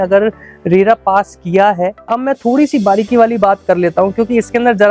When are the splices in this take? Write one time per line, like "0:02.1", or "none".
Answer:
0:02.1